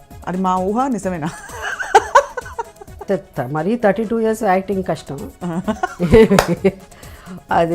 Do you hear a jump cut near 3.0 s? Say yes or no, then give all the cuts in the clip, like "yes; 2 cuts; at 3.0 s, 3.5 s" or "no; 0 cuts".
yes; 1 cut; at 3.0 s